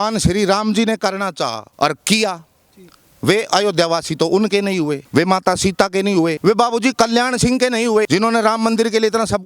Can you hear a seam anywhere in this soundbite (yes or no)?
yes